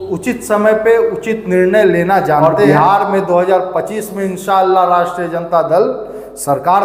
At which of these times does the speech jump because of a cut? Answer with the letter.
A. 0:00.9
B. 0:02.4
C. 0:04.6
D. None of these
B